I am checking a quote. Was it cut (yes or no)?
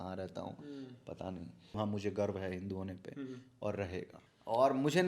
yes